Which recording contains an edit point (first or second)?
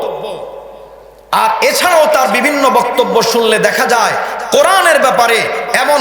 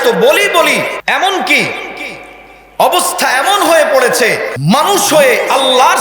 second